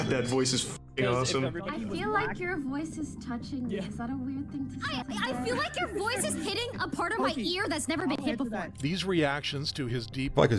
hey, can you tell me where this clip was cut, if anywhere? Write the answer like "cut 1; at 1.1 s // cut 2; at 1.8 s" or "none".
none

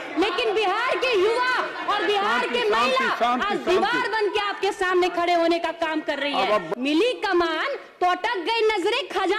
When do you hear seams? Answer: cut 1; at 6.7 s

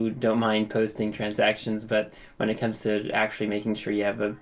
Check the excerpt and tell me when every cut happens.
none

